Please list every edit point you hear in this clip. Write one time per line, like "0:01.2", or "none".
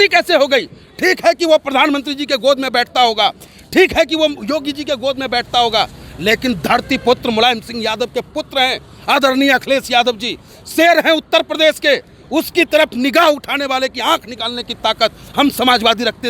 none

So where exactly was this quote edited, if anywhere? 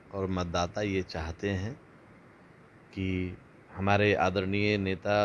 none

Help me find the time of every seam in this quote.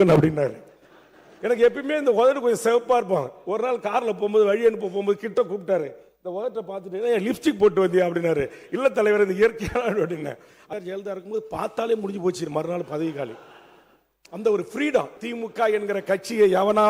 0:10.6
0:15.2

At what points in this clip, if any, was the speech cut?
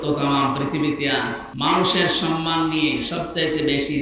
0:01.4

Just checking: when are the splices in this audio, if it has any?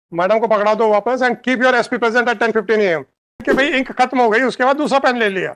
0:03.4

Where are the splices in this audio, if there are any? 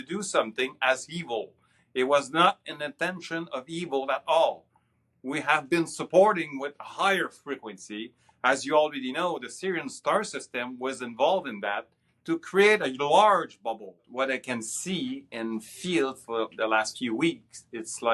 0:14.1

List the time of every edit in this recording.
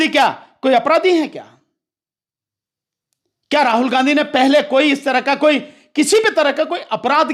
none

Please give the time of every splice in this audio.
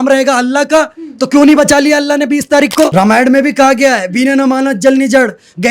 0:02.9

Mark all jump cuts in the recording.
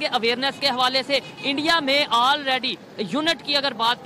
none

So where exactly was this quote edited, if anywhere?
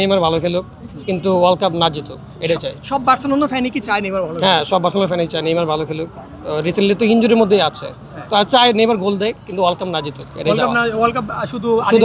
none

